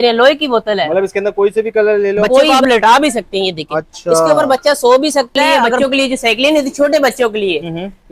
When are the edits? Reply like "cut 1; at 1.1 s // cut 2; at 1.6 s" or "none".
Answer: cut 1; at 2.5 s // cut 2; at 5.7 s